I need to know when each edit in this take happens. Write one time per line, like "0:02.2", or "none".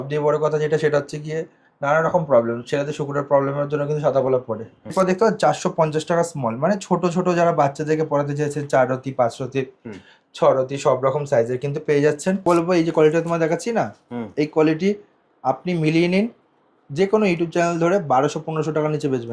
0:04.9
0:12.4